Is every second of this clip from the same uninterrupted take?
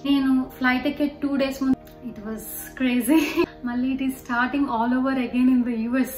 no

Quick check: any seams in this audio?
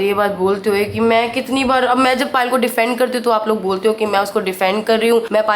no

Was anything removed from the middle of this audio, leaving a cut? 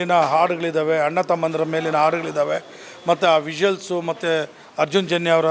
no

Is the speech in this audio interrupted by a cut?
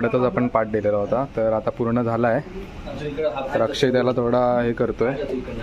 no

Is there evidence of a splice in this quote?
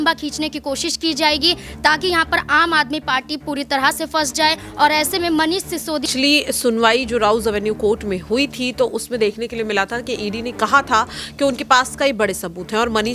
yes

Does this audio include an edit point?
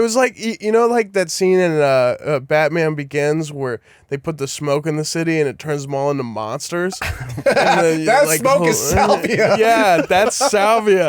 no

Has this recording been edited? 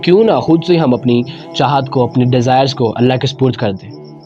no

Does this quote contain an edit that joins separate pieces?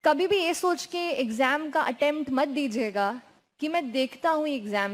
no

